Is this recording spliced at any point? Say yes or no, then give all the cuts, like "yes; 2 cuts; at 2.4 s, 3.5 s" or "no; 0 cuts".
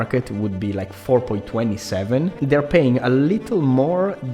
yes; 1 cut; at 2.4 s